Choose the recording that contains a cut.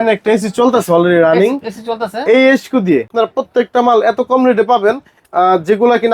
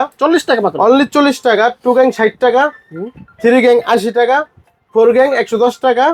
first; 1 cut; at 3.1 s

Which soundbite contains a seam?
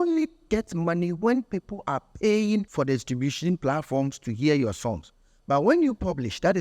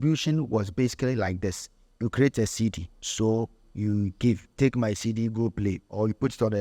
first; 1 cut; at 2.7 s

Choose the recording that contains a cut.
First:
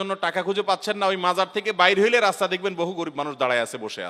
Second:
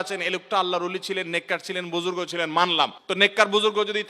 second; 1 cut; at 3.0 s

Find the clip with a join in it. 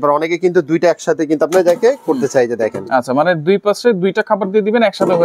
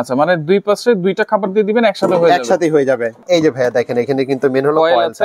second; 1 cut; at 3.2 s

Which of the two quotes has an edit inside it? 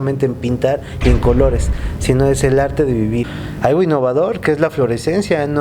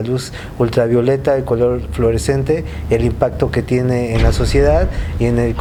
first; 1 cut; at 3.4 s

